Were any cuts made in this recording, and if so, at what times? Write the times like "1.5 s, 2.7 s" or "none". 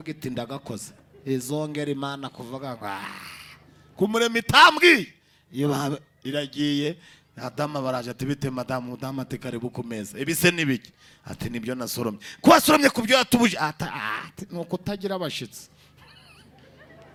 none